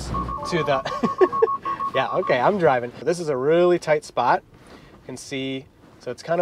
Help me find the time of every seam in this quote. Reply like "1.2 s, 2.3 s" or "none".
2.9 s